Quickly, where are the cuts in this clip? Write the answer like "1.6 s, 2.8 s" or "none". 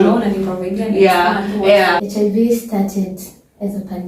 2.0 s